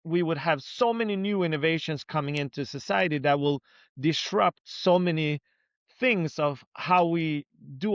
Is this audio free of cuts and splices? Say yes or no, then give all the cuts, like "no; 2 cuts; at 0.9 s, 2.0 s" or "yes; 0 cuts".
yes; 0 cuts